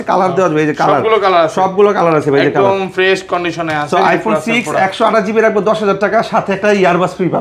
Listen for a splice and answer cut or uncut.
uncut